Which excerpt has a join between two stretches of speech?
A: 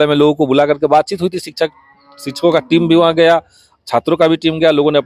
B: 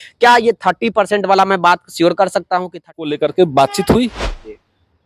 B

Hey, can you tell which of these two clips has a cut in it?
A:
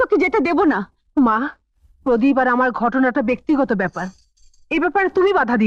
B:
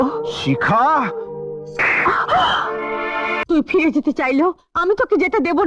B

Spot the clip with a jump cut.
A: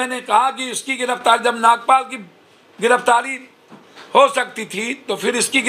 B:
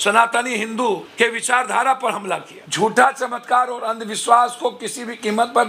B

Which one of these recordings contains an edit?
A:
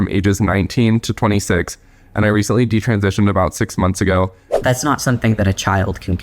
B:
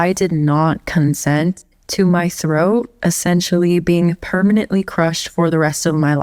A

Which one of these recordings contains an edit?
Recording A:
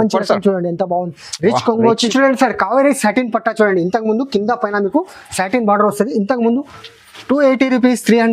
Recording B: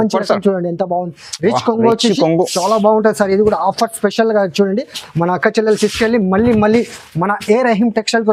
A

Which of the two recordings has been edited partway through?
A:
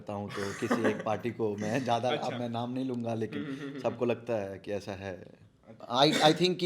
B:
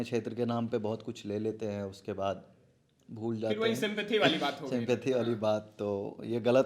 A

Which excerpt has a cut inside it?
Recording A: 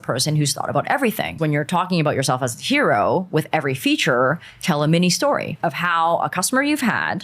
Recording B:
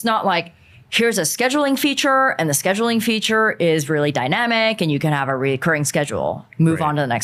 A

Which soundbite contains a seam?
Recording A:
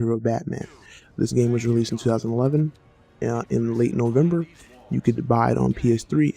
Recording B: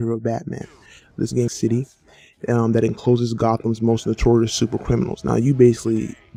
A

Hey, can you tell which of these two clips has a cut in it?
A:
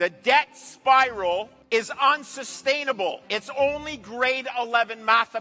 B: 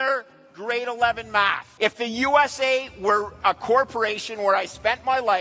B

